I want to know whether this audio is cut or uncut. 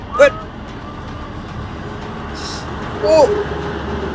uncut